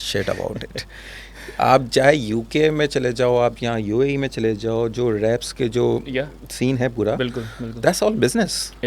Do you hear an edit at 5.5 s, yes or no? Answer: yes